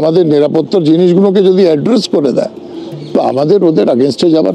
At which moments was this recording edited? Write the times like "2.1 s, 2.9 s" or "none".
none